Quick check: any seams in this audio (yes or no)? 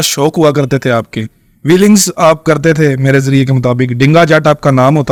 no